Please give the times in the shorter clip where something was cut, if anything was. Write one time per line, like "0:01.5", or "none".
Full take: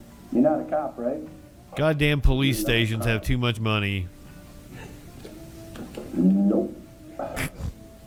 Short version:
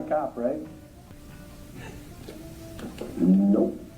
0:01.1